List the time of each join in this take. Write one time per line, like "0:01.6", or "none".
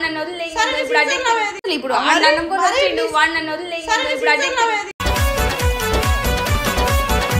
0:01.6
0:04.9